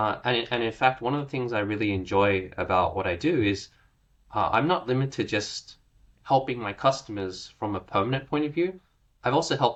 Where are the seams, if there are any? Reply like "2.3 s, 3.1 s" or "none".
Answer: none